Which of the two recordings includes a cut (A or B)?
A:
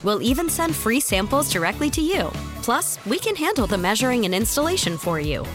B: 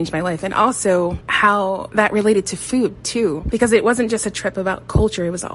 B